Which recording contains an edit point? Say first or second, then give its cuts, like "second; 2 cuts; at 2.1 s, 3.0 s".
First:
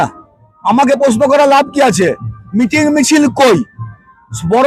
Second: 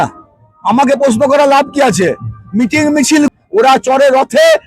second; 1 cut; at 3.3 s